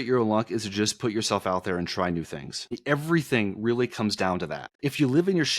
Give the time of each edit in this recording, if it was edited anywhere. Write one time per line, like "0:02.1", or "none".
0:02.8
0:04.6